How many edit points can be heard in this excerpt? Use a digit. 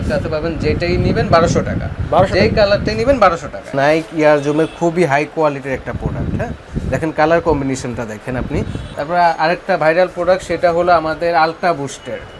2